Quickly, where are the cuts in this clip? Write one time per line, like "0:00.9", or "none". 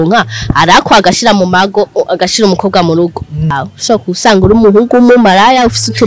0:03.7